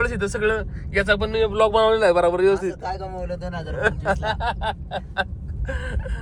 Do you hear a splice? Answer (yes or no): no